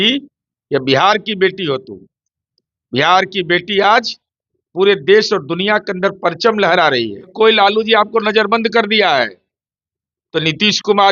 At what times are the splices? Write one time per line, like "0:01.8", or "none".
0:07.3

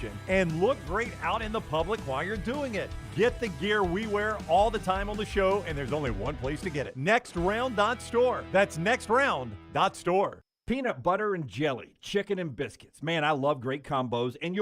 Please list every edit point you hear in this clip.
0:10.5

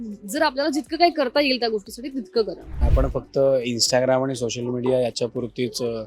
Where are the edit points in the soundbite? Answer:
0:02.8

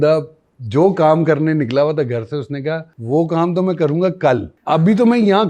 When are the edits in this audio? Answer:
0:02.9
0:04.5

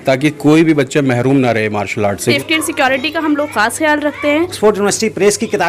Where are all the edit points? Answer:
0:02.3
0:04.5

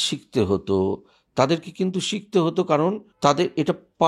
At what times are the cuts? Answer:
0:03.1

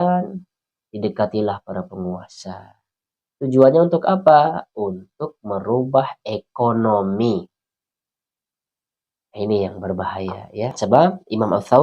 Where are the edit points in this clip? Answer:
0:10.8

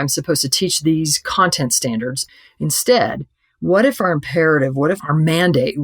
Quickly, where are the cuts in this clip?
0:02.2

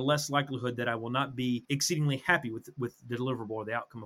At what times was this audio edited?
0:01.6

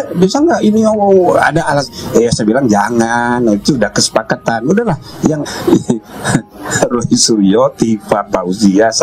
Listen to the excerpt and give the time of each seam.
0:05.4

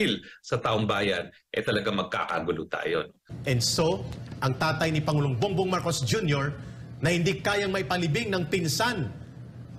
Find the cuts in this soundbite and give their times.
0:03.2

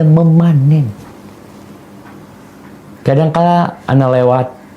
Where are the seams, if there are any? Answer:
none

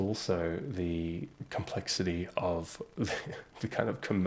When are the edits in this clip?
0:01.3

